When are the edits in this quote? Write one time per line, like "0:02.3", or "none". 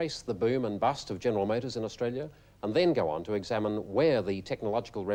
none

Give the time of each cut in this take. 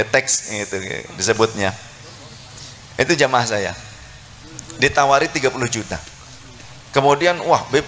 none

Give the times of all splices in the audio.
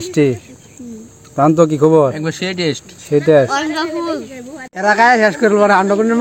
0:04.7

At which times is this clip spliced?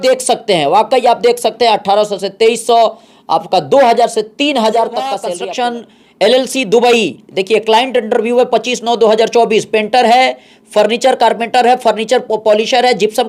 0:05.3

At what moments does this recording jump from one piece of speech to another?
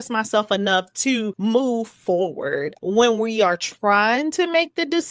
0:01.3
0:02.7

